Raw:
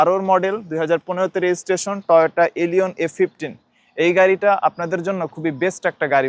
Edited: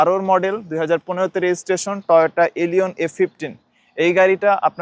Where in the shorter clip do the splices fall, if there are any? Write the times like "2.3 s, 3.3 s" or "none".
none